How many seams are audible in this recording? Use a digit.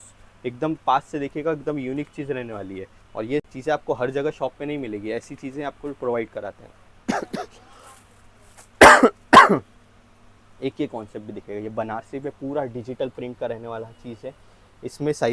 0